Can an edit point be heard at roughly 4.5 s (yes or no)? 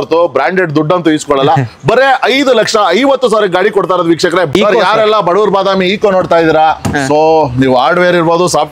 yes